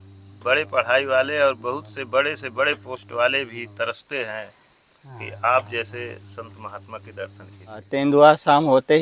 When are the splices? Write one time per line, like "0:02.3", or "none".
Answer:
0:07.8